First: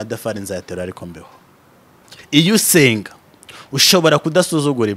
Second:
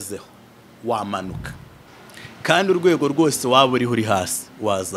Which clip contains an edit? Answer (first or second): first